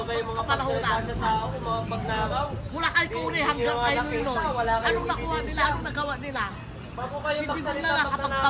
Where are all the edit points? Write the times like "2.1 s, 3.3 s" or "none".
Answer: none